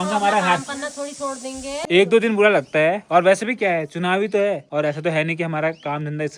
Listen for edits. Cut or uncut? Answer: cut